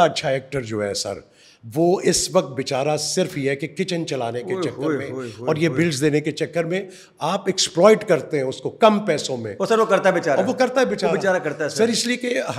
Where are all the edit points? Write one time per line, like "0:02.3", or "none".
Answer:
none